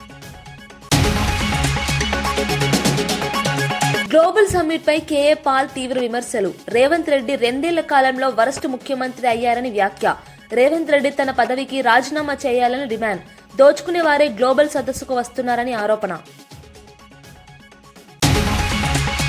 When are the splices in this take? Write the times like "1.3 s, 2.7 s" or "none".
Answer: 0.8 s, 4.0 s, 16.1 s, 18.2 s